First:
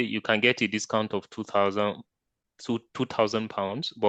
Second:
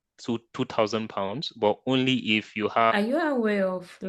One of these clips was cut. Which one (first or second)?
second